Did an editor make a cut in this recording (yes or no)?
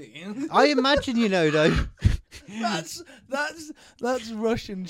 no